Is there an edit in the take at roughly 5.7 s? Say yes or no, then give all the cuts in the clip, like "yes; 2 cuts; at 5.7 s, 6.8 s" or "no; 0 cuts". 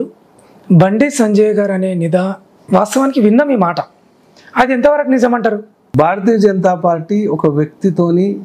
yes; 1 cut; at 5.7 s